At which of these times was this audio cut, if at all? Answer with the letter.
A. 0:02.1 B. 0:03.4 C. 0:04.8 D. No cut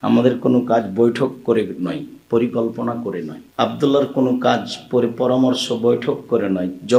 B